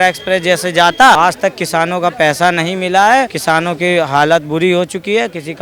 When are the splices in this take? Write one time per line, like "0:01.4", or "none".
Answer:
0:01.2
0:03.3